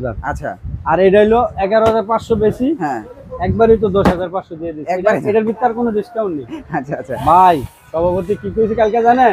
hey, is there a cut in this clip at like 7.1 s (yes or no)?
yes